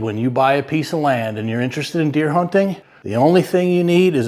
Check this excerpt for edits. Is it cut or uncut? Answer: uncut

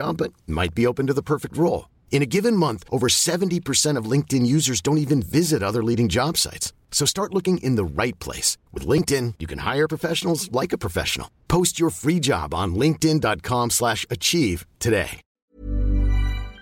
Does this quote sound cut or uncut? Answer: cut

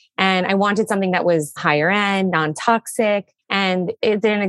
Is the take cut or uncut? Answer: cut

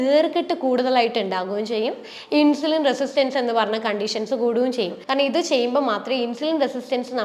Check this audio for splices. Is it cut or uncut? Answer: cut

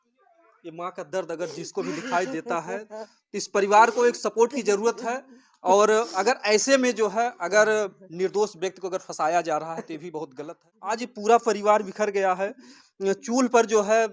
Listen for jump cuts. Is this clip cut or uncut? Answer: cut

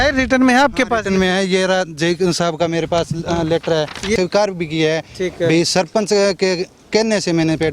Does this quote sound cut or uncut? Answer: cut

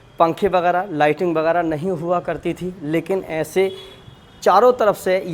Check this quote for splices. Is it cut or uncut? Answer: uncut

